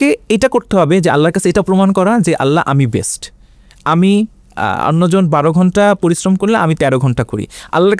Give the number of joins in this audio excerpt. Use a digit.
0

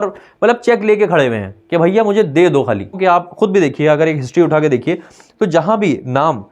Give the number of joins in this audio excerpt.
1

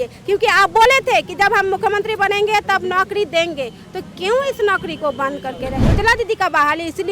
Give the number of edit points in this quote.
1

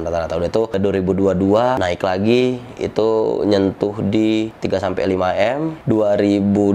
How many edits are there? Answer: 0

